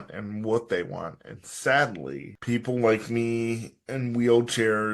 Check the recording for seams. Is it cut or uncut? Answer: cut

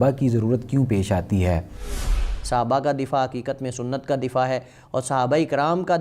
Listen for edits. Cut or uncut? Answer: cut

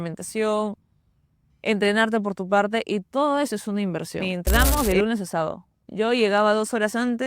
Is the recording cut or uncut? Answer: cut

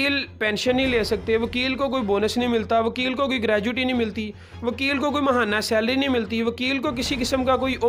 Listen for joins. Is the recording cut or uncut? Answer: uncut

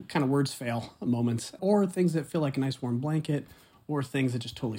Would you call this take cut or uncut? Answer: uncut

